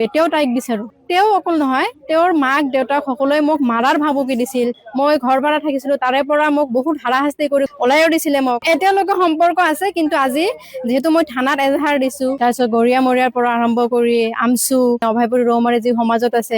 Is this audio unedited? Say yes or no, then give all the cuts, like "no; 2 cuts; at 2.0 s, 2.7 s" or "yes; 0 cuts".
no; 4 cuts; at 0.9 s, 4.8 s, 7.7 s, 8.6 s